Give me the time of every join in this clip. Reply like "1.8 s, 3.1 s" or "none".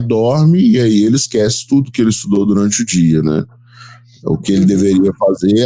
none